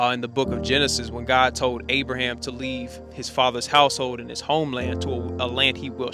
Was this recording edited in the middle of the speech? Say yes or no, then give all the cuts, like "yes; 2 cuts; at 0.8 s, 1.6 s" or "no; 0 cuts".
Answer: no; 0 cuts